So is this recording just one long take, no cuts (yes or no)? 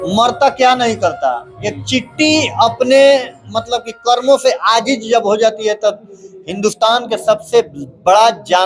yes